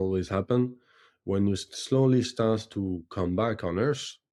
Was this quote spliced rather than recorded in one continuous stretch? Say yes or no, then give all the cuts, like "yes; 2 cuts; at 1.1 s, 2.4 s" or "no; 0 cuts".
no; 0 cuts